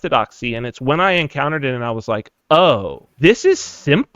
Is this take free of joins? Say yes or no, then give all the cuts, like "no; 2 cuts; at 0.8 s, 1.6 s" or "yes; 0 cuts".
no; 1 cut; at 3.0 s